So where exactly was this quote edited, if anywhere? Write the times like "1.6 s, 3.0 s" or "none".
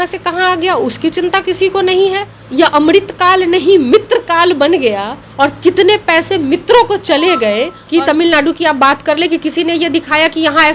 2.3 s, 7.8 s